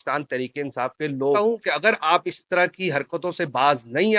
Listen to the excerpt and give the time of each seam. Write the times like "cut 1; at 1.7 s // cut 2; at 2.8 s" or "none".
cut 1; at 1.4 s